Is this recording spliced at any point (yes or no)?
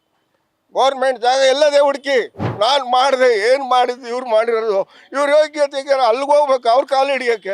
yes